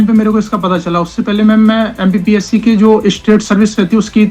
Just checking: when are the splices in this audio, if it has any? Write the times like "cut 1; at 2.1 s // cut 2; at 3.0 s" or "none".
none